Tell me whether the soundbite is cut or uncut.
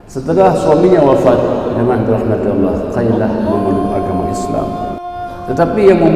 cut